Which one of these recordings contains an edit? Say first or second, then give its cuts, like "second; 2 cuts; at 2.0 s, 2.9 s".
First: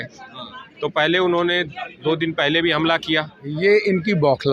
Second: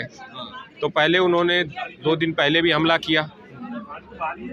first; 1 cut; at 3.4 s